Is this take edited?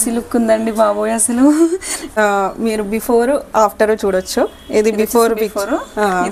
yes; 1 cut; at 2.2 s

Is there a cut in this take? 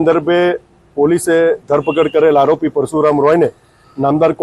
yes; 1 cut; at 3.0 s

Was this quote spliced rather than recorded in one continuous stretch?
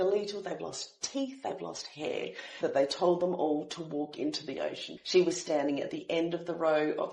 yes; 2 cuts; at 2.5 s, 4.9 s

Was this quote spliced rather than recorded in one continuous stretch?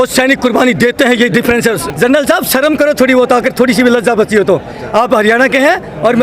yes; 1 cut; at 1.9 s

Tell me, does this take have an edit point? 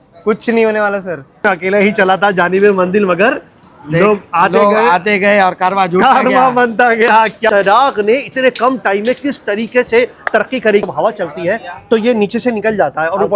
yes; 3 cuts; at 1.4 s, 7.5 s, 10.8 s

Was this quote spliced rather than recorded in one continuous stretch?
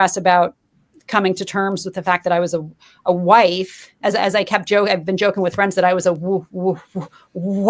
no; 0 cuts

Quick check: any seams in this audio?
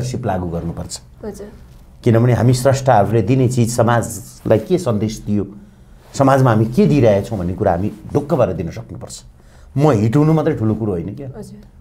no; 0 cuts

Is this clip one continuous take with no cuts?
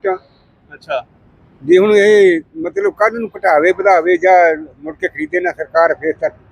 yes; 0 cuts

